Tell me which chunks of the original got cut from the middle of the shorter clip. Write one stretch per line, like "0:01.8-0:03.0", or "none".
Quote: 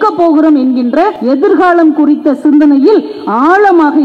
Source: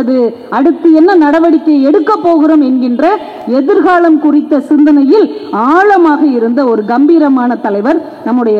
0:03.2-0:03.4